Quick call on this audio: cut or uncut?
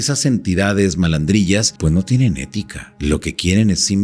cut